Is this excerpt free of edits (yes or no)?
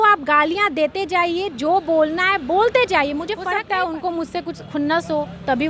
no